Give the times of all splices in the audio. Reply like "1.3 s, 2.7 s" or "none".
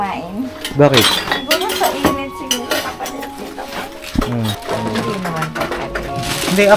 4.6 s

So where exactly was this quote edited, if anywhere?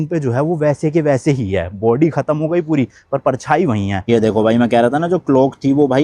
4.1 s

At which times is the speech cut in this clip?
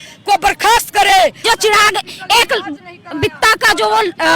1.4 s

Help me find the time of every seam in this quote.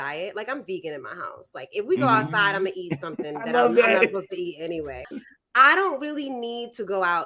5.1 s

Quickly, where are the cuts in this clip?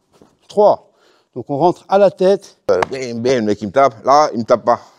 2.7 s

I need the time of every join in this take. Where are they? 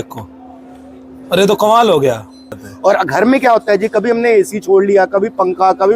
2.5 s

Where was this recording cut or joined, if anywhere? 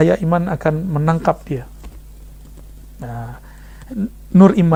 none

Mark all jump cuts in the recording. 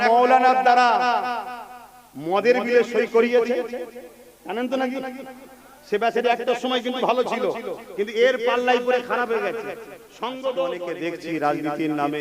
10.8 s

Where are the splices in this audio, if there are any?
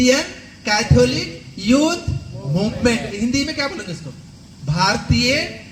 none

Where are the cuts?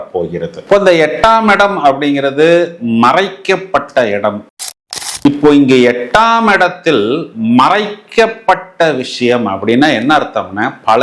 4.6 s

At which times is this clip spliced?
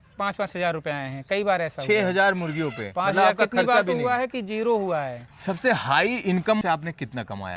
5.2 s, 6.6 s

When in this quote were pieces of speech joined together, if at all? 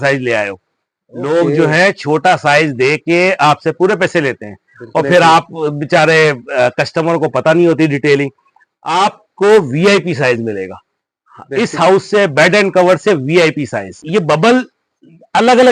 14.0 s

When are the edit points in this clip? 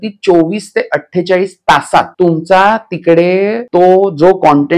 2.1 s, 3.6 s

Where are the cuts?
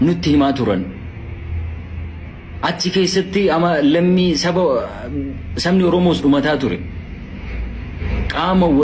none

